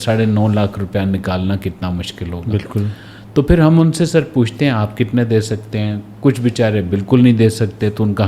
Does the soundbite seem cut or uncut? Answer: uncut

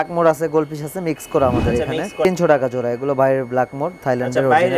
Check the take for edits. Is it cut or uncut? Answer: cut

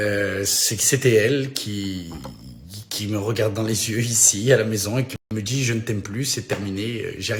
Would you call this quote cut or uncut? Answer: uncut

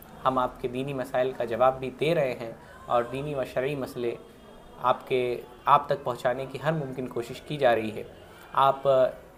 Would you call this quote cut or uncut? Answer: uncut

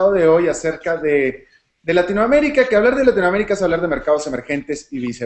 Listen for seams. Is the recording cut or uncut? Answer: cut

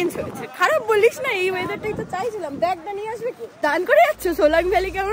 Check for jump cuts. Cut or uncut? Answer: cut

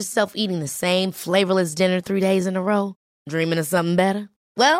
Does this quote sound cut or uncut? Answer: uncut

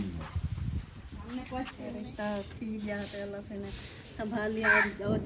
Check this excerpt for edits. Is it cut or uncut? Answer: cut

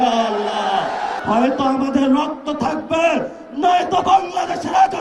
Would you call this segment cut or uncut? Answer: cut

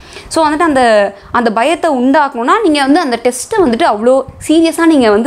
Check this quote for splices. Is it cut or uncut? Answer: uncut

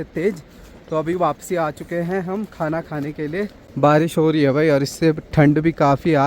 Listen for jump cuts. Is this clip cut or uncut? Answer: cut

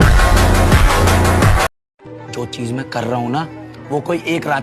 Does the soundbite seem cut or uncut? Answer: cut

